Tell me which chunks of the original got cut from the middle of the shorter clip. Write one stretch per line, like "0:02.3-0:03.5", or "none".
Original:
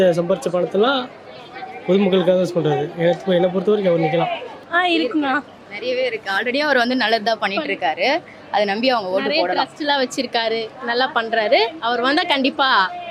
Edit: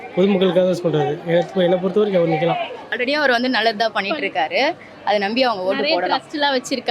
0:04.5-0:06.3